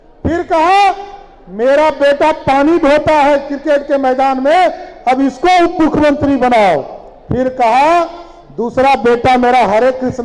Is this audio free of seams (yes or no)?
yes